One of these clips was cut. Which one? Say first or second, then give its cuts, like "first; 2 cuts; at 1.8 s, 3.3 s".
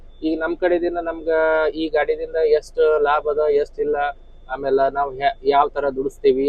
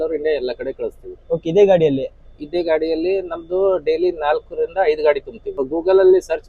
second; 1 cut; at 5.6 s